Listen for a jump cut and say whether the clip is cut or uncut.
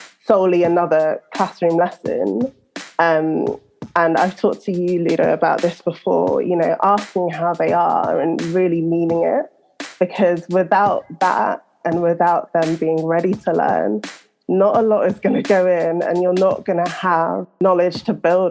cut